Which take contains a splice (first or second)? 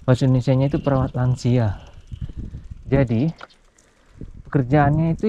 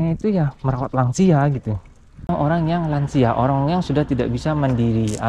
second